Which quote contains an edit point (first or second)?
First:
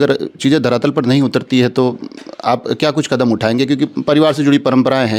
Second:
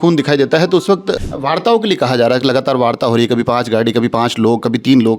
second